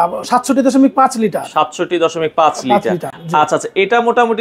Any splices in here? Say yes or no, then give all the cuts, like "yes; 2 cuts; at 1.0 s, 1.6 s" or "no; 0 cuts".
no; 0 cuts